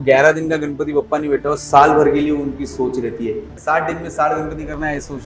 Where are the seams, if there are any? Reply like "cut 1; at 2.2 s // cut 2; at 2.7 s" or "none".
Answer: cut 1; at 3.5 s